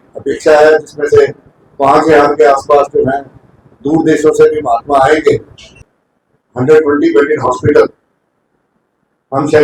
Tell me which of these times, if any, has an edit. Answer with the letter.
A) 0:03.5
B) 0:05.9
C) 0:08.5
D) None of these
B